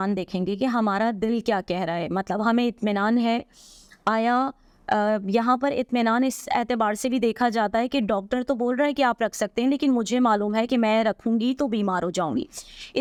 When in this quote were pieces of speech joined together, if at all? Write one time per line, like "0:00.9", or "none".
none